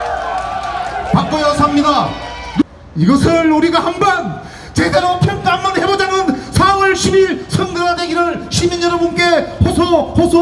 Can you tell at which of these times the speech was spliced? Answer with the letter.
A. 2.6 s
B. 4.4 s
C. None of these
A